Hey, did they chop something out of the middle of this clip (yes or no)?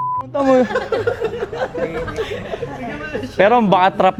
no